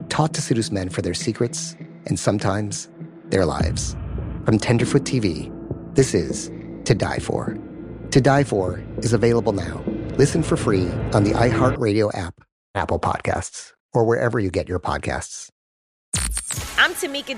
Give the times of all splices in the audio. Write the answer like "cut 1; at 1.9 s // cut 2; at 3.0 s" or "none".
cut 1; at 15.8 s